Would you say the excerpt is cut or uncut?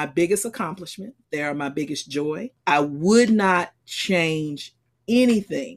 cut